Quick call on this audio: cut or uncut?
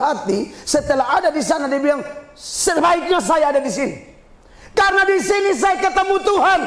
uncut